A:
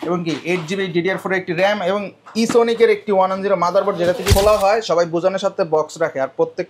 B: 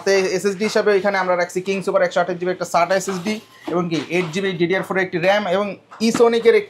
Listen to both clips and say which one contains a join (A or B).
A